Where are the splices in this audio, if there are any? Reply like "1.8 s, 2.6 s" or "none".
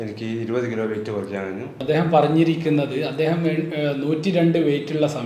1.7 s

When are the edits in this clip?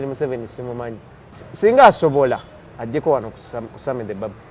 1.4 s

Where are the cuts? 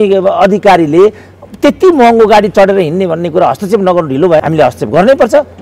4.4 s

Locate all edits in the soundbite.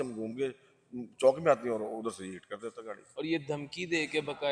2.9 s

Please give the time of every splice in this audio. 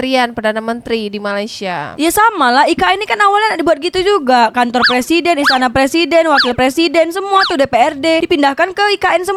none

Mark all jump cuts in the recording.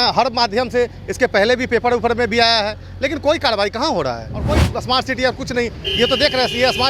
4.7 s

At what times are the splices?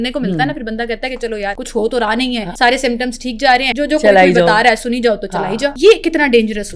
1.6 s, 2.5 s, 3.7 s, 5.7 s

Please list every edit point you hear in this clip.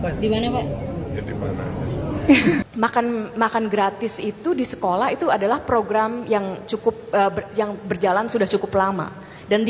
2.6 s

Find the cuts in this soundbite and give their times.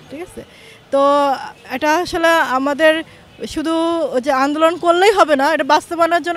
none

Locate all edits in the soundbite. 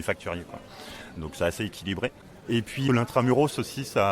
2.8 s

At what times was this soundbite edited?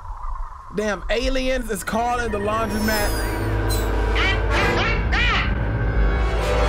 none

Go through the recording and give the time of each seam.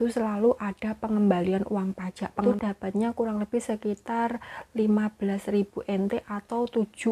2.4 s

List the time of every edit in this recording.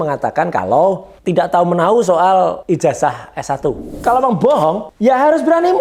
1.1 s, 2.6 s, 3.9 s, 4.9 s

